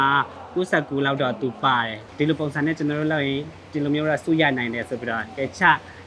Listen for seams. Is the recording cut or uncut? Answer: cut